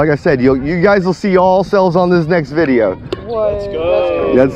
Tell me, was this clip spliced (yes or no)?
no